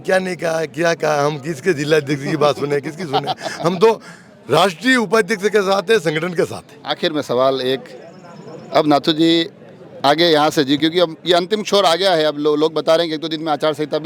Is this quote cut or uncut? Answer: uncut